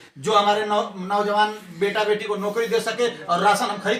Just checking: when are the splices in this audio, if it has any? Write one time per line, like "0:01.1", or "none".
none